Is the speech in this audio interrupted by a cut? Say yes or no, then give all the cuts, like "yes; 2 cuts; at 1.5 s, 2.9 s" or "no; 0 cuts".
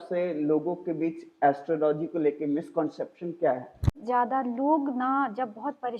yes; 1 cut; at 4.0 s